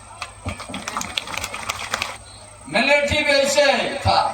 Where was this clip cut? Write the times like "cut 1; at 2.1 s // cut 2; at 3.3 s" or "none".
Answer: cut 1; at 2.2 s